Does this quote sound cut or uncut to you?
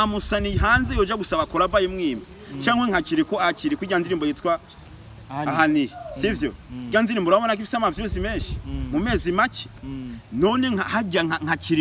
uncut